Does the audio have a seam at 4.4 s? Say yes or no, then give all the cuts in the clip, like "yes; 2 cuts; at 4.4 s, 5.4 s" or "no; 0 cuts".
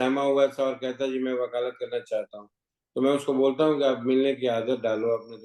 no; 0 cuts